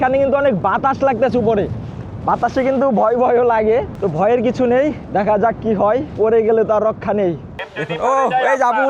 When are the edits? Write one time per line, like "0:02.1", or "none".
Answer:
0:03.9
0:05.0
0:06.1
0:07.5